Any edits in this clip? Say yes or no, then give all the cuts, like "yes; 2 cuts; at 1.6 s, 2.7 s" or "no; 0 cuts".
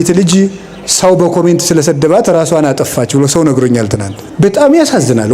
yes; 1 cut; at 4.2 s